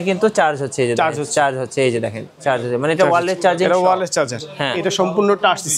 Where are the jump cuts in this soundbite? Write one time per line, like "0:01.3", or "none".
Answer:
0:04.5